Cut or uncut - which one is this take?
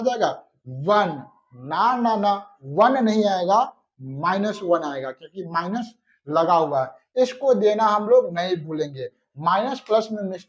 uncut